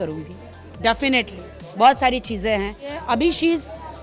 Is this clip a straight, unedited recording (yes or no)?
no